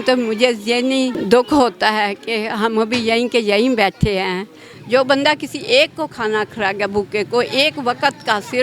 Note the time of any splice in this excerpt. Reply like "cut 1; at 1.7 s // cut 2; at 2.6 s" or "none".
cut 1; at 1.2 s // cut 2; at 4.8 s